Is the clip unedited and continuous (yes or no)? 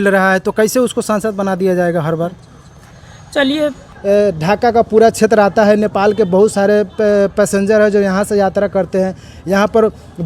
no